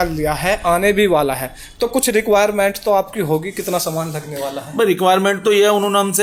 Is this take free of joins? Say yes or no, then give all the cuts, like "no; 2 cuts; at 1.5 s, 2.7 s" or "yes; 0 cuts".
yes; 0 cuts